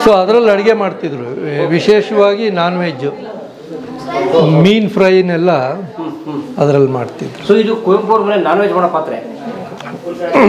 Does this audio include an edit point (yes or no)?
no